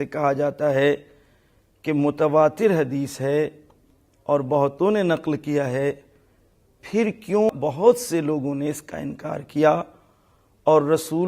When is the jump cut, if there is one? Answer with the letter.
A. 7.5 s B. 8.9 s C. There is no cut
A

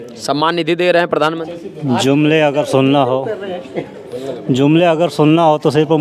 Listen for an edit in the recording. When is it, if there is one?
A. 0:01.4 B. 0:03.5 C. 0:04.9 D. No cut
A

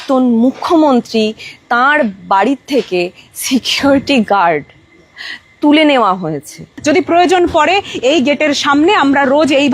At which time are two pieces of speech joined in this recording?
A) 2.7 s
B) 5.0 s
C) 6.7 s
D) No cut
C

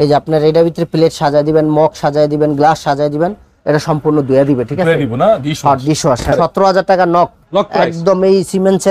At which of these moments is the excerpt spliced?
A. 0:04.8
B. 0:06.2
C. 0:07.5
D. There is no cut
B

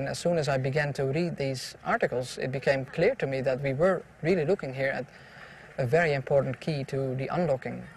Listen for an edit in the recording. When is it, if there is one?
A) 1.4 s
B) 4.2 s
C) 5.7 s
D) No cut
C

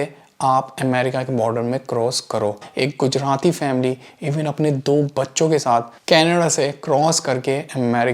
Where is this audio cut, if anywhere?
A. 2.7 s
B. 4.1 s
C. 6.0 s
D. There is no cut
A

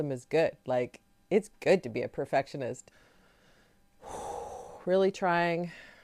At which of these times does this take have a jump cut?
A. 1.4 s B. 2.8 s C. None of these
B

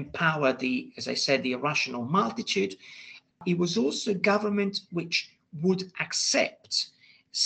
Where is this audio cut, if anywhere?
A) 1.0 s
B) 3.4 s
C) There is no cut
B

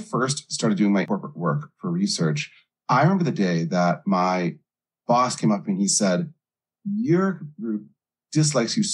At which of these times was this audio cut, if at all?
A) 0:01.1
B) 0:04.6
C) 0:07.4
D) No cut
A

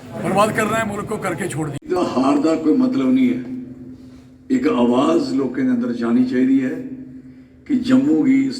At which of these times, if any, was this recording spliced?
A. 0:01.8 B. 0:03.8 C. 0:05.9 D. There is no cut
A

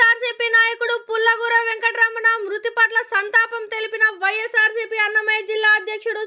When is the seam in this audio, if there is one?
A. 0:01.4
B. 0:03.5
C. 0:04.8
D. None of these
D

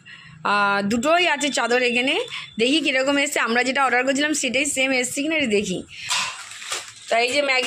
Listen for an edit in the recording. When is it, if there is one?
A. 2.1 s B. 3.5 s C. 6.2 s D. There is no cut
C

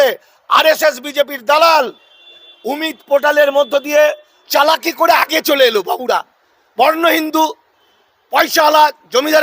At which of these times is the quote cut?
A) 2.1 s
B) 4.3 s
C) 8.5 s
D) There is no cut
B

